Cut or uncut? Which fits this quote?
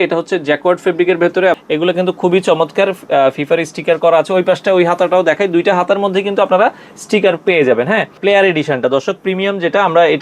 cut